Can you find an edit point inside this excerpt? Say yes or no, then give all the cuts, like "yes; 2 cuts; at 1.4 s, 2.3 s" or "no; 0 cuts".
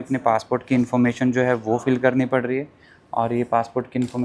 no; 0 cuts